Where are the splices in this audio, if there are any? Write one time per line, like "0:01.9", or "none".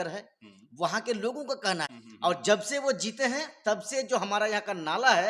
0:01.9